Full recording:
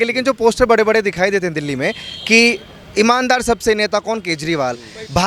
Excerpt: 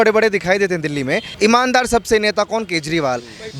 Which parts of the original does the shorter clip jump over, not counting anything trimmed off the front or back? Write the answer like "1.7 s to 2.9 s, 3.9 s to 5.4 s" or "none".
2.0 s to 2.8 s